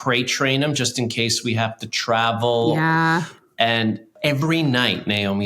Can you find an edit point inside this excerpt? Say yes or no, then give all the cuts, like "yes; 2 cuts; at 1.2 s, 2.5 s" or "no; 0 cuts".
yes; 2 cuts; at 3.2 s, 4.2 s